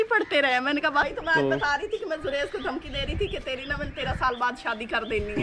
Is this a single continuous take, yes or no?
no